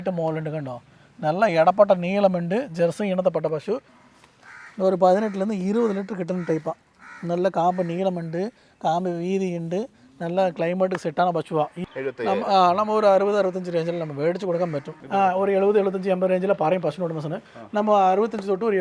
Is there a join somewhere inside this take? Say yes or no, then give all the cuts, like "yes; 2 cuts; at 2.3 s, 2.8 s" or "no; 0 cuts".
yes; 3 cuts; at 3.9 s, 11.8 s, 15.0 s